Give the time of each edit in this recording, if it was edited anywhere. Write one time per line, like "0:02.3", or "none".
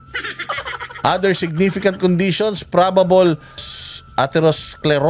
0:03.7